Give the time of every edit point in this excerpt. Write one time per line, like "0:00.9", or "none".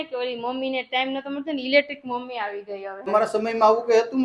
0:03.0